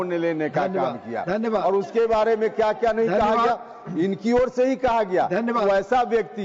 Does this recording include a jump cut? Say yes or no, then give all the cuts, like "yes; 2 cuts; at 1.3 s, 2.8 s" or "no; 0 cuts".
no; 0 cuts